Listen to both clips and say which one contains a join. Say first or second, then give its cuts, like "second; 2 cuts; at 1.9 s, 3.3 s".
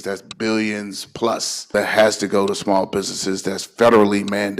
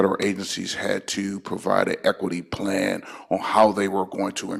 first; 1 cut; at 1.7 s